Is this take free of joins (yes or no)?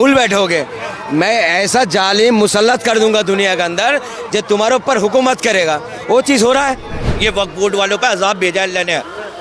no